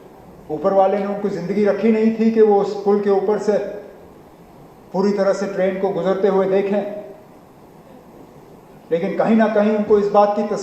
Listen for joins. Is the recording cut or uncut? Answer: uncut